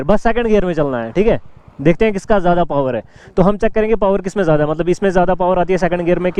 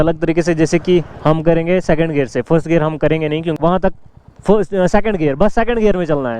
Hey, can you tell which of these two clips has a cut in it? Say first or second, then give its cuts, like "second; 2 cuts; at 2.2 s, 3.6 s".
second; 1 cut; at 3.5 s